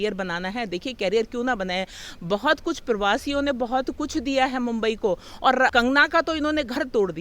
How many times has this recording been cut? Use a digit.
1